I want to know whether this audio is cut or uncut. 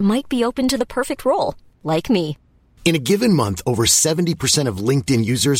uncut